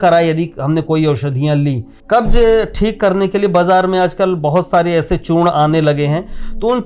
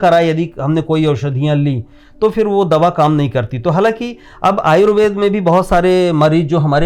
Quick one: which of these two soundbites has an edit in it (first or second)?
first